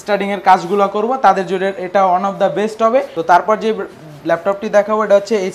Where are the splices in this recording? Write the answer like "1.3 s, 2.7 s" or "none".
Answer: 3.1 s